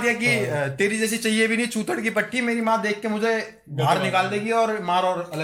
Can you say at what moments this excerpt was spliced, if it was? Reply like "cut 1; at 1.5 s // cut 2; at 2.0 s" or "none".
none